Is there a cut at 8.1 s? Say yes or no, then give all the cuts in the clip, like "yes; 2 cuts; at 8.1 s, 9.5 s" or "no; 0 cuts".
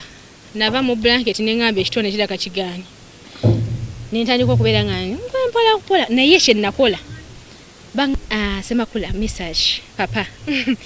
yes; 1 cut; at 8.1 s